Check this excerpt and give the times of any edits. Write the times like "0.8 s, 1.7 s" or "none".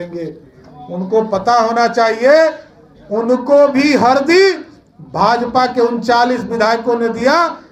none